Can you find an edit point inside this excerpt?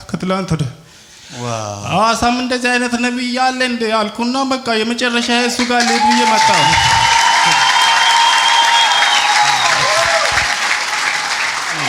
no; 0 cuts

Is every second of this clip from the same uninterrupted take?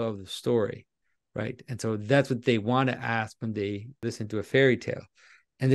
no; 1 cut; at 4.0 s

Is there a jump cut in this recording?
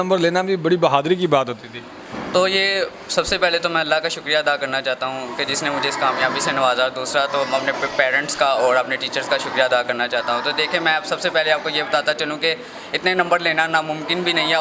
no; 0 cuts

